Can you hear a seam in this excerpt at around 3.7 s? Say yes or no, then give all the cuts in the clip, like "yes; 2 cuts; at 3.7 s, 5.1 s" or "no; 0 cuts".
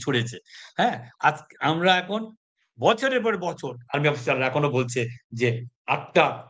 yes; 1 cut; at 3.7 s